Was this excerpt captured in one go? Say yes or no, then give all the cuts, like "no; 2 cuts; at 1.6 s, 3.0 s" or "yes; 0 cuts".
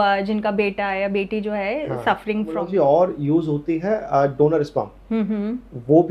no; 1 cut; at 2.6 s